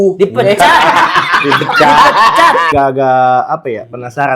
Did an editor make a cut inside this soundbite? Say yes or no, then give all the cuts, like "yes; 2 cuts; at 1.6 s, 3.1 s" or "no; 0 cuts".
yes; 1 cut; at 2.7 s